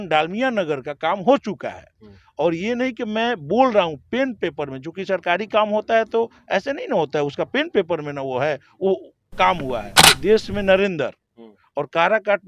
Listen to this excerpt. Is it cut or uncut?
cut